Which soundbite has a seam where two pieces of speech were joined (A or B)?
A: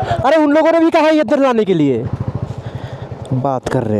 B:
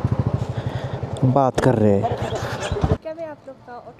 B